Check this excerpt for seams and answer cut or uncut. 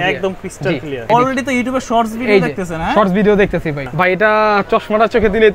cut